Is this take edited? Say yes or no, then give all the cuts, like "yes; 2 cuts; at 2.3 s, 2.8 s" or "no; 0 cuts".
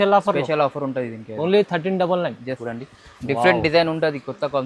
yes; 1 cut; at 2.6 s